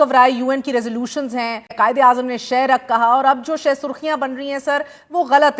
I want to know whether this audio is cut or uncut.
cut